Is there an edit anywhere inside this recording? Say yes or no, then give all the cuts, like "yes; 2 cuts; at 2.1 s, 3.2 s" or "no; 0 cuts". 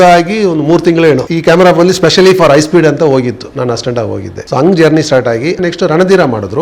yes; 3 cuts; at 1.3 s, 4.3 s, 5.6 s